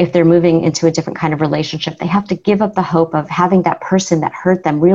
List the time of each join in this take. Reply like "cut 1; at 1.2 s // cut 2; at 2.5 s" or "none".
cut 1; at 3.3 s